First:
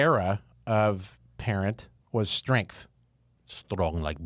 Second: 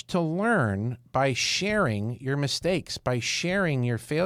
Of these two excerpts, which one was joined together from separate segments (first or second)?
first